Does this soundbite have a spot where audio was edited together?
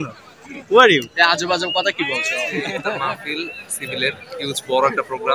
yes; 1 cut; at 2.7 s

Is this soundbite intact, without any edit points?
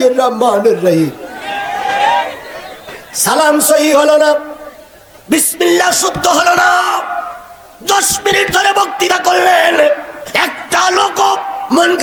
yes; 0 cuts

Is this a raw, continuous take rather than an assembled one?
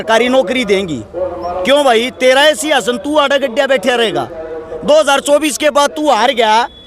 yes; 0 cuts

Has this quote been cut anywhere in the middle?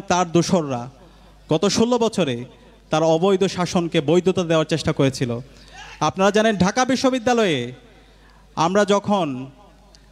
no; 0 cuts

